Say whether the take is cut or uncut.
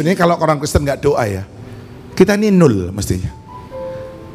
uncut